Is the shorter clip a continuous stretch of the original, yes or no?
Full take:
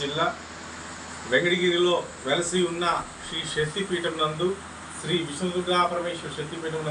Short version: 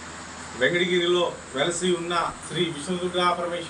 no